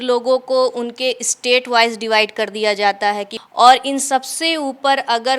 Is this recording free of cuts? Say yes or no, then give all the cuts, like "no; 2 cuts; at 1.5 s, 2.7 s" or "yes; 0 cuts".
no; 1 cut; at 3.3 s